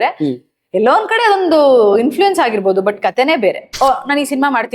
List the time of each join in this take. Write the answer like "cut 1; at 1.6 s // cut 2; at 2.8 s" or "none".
cut 1; at 3.7 s